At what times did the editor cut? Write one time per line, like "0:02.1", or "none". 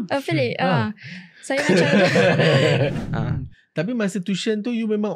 0:03.0